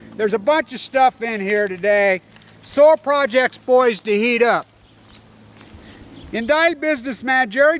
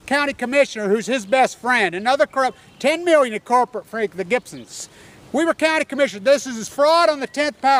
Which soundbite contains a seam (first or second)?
first